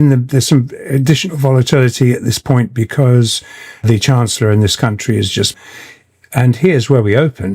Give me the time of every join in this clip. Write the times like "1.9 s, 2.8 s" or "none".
5.5 s